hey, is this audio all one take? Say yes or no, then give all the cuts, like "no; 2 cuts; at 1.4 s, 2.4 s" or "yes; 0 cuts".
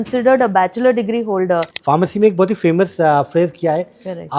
no; 1 cut; at 1.7 s